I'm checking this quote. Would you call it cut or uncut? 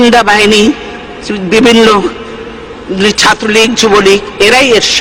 uncut